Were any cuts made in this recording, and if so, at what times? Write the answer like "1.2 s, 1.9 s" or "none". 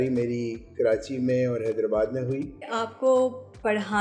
2.8 s